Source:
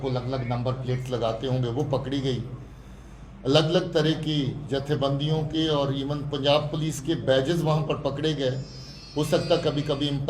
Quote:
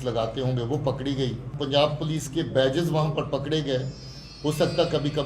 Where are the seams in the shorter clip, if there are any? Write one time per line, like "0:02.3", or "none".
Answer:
0:01.5